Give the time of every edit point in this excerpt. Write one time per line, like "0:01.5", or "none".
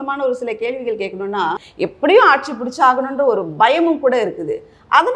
0:01.7